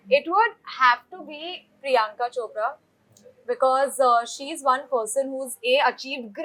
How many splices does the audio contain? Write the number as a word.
zero